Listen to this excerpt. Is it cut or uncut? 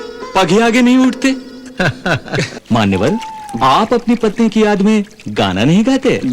cut